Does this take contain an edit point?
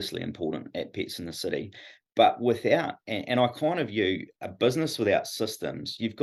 no; 0 cuts

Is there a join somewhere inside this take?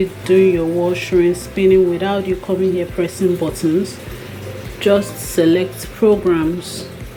no; 0 cuts

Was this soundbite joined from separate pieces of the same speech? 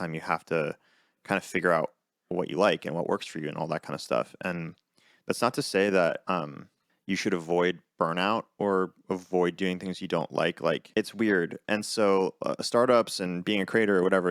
yes; 2 cuts; at 10.9 s, 11.6 s

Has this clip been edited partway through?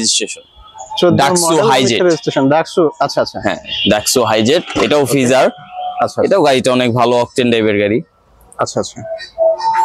no; 0 cuts

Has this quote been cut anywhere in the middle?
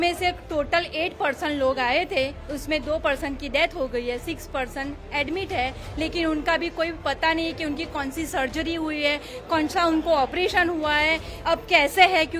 no; 0 cuts

